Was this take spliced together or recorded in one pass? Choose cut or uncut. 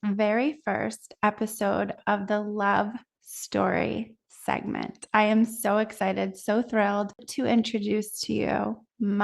cut